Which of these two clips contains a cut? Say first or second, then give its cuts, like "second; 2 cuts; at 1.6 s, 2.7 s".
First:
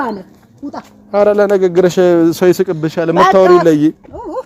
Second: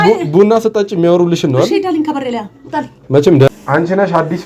second; 1 cut; at 3.5 s